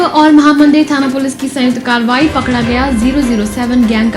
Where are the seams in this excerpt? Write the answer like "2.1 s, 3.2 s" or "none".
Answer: none